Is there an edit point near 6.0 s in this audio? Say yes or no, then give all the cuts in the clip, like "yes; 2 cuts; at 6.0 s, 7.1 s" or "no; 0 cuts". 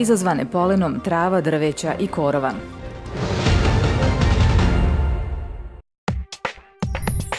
yes; 1 cut; at 6.0 s